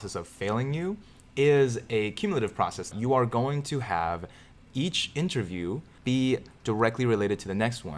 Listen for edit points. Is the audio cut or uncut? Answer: cut